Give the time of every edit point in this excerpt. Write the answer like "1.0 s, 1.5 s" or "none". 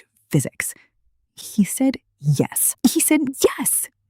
1.4 s, 2.6 s